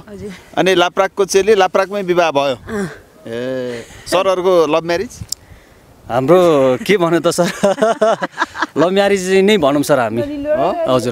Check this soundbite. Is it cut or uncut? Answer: uncut